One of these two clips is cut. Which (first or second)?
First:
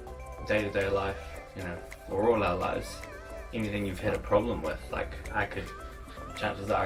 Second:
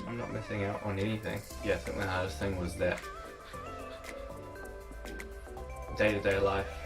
second